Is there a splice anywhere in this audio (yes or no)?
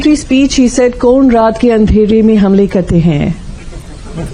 no